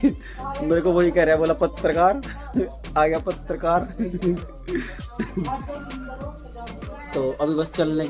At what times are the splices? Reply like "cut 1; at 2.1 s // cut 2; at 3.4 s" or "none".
none